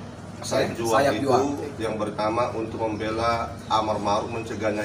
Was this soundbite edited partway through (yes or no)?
no